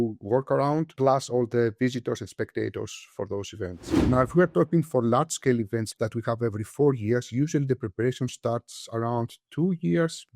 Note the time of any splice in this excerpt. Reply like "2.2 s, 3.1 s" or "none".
3.9 s, 5.9 s